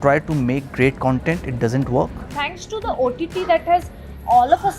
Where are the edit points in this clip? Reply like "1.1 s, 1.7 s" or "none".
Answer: 2.2 s